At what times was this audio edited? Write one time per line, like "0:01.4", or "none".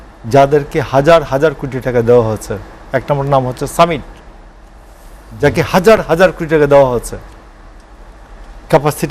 none